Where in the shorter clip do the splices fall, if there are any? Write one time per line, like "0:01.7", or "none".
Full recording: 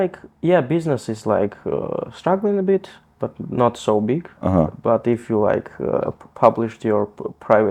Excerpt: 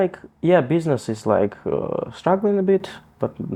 none